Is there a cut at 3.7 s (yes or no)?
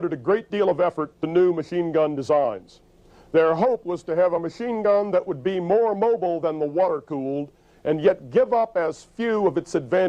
no